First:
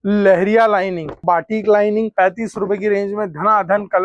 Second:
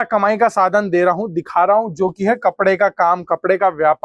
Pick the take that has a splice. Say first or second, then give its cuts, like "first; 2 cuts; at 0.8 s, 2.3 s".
first; 2 cuts; at 1.2 s, 2.1 s